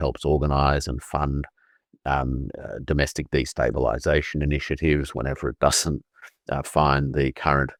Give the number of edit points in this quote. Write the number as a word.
zero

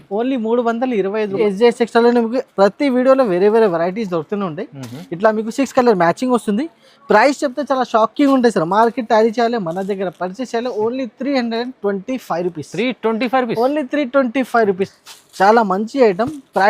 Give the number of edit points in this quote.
two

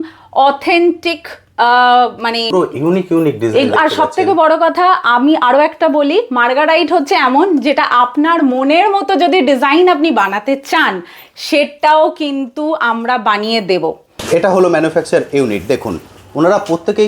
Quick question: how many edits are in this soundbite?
two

